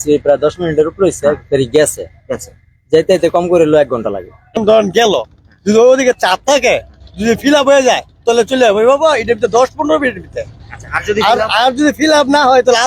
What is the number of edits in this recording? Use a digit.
1